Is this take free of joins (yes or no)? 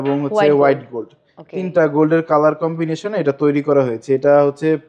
yes